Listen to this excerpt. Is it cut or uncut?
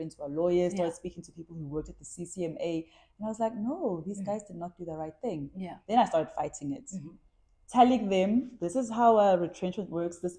uncut